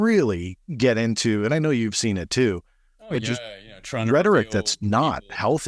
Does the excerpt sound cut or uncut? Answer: uncut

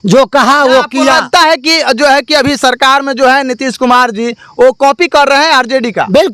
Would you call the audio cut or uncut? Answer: uncut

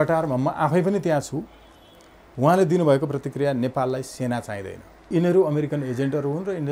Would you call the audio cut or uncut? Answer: cut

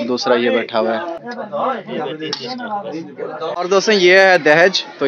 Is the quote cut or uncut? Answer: cut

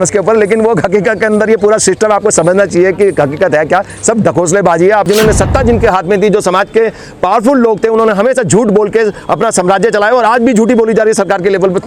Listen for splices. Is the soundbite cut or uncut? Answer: cut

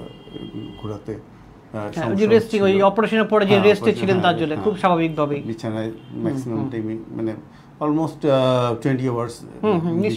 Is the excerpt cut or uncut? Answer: uncut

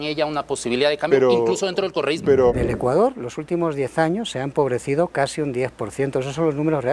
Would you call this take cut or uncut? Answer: cut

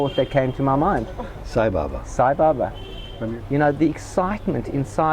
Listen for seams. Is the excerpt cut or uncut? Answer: cut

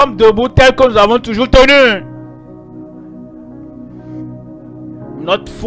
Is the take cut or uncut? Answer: cut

